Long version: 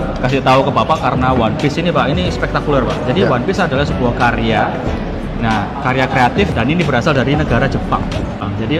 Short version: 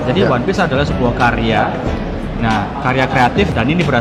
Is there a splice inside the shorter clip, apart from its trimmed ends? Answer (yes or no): no